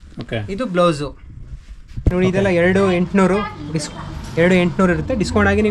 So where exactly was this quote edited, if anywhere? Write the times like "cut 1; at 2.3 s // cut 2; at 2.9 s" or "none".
cut 1; at 2.0 s